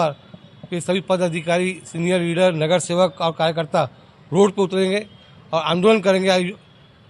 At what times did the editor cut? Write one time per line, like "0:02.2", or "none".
none